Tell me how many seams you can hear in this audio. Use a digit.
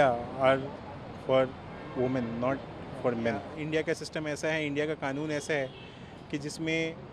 1